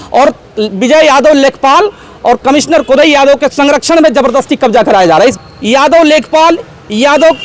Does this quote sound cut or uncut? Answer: cut